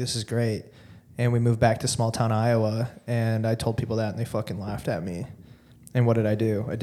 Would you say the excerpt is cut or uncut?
uncut